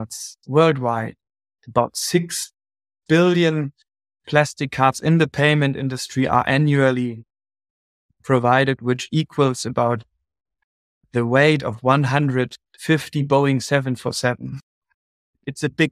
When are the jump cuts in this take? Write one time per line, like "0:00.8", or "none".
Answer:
none